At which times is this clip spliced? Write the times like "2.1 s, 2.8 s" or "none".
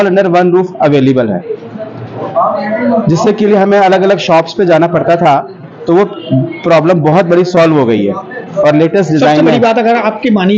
none